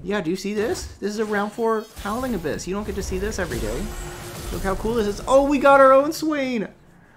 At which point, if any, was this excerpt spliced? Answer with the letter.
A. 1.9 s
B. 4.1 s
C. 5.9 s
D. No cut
D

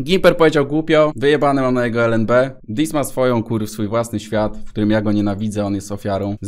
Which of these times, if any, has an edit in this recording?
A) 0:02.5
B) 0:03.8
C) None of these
A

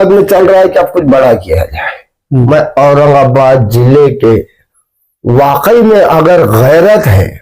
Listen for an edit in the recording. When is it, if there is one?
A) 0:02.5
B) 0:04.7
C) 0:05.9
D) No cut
A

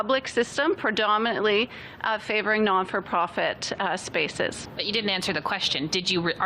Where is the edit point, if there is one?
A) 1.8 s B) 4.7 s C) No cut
B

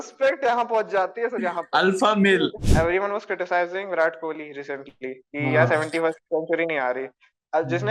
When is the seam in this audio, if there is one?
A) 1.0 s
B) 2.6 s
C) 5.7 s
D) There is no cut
B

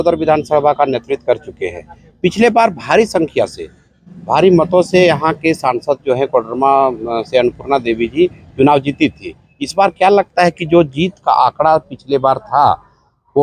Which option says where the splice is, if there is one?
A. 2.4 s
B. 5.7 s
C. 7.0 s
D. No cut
D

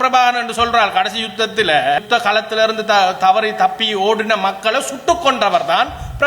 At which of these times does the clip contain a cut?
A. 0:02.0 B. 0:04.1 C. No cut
A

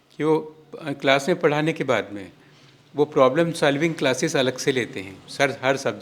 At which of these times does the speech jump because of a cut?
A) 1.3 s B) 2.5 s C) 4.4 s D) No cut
D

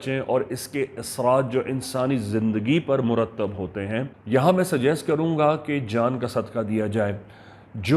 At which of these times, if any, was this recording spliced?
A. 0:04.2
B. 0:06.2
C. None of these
A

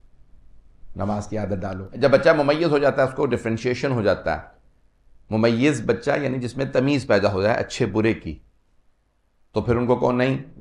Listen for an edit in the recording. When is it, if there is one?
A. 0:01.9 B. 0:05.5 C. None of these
A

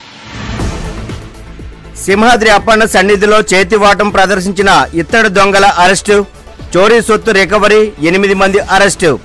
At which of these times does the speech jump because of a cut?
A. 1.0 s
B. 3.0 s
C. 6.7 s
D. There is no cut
A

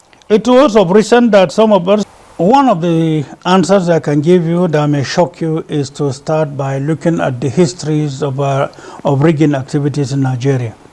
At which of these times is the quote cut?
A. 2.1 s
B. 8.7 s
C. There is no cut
A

